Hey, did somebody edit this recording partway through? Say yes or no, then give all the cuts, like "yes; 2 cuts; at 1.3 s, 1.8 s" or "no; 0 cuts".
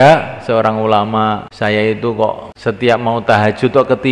yes; 2 cuts; at 1.5 s, 2.5 s